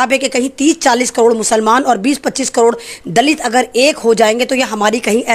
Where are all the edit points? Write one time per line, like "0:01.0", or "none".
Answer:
none